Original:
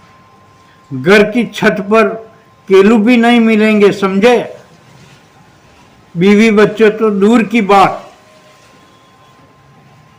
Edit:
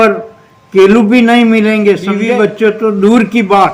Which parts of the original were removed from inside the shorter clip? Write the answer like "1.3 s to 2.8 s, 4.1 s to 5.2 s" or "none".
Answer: 4.2 s to 6.4 s